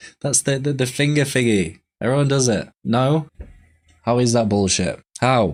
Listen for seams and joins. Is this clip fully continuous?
yes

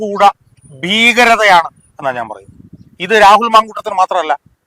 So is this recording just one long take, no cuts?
yes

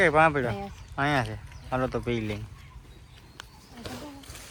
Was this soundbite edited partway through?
no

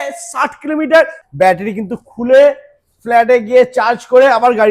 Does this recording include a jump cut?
yes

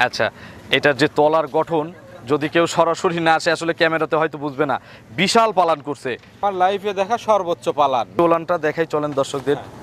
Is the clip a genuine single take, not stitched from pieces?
no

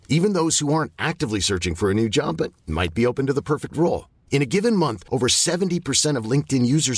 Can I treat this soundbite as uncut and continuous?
yes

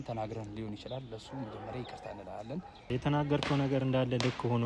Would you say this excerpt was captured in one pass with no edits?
no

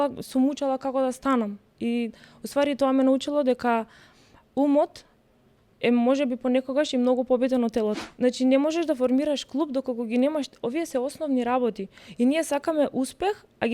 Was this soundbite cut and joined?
yes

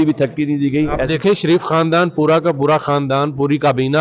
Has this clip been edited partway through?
no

